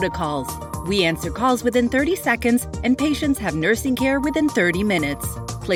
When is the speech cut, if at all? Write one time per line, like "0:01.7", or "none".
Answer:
none